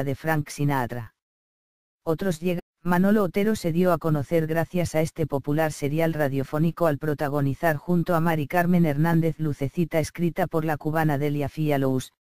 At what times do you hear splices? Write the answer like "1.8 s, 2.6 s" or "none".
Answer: none